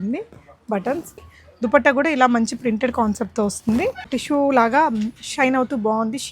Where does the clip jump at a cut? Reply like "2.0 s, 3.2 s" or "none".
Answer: 1.3 s, 4.2 s